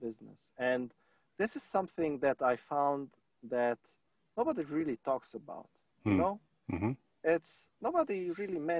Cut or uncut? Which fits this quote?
uncut